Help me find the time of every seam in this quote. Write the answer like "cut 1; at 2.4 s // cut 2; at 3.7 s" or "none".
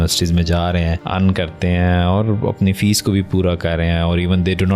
cut 1; at 1.0 s